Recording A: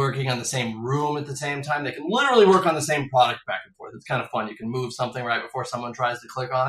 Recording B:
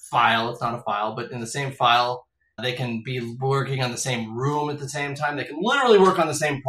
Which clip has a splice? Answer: B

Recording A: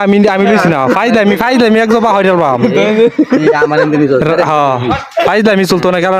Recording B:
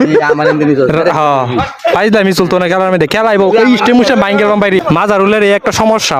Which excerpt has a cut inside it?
B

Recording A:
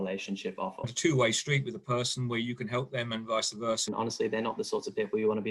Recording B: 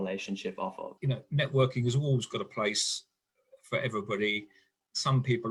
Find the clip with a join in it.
A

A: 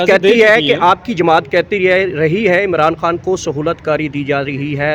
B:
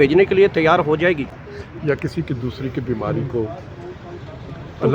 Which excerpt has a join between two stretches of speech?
B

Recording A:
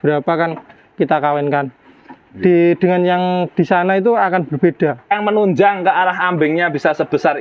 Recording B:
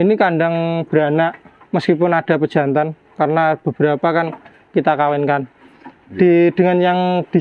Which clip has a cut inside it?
A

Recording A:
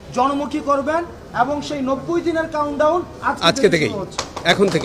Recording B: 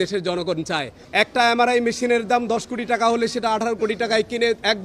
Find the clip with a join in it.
B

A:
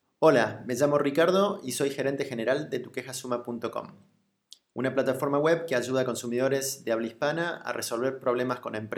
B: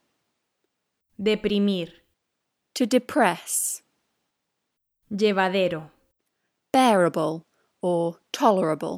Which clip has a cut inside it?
A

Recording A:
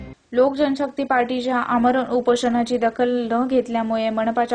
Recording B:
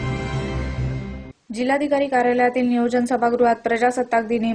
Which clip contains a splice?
B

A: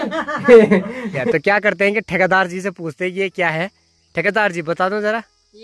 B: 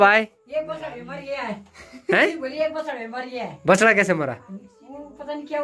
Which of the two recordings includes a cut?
A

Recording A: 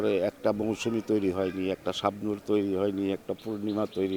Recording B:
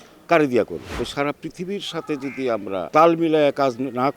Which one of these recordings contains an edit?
B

